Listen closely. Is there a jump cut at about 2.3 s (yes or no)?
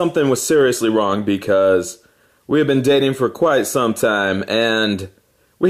yes